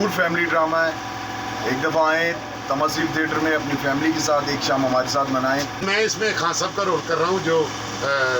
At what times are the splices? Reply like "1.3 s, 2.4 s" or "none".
5.8 s